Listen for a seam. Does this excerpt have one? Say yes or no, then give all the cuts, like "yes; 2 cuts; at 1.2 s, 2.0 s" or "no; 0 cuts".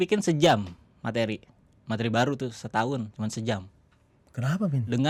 no; 0 cuts